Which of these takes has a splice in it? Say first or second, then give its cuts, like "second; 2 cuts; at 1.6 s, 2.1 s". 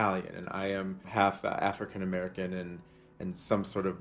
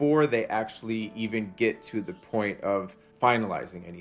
second; 1 cut; at 3.0 s